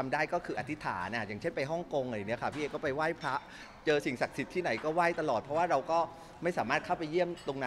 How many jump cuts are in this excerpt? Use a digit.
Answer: 0